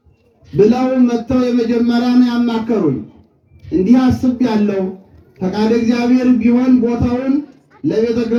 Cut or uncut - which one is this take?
uncut